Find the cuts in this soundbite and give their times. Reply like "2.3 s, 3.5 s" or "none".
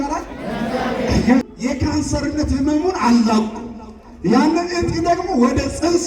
1.5 s